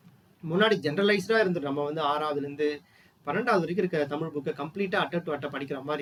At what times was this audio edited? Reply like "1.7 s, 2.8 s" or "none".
none